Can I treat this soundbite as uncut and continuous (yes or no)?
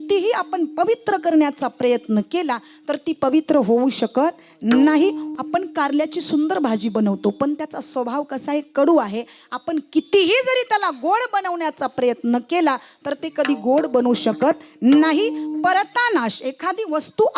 no